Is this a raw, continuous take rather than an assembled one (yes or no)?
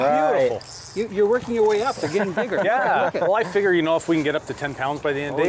yes